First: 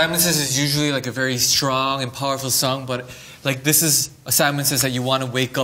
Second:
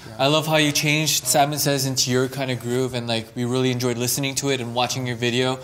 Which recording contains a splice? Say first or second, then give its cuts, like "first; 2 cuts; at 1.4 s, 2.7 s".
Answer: second; 1 cut; at 1.3 s